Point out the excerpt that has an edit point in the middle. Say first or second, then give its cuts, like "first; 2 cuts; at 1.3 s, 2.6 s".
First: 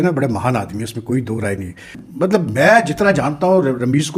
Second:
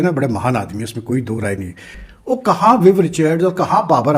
second; 1 cut; at 2.0 s